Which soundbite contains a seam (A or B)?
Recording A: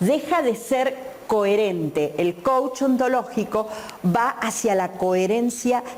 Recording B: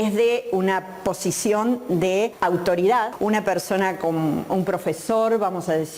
B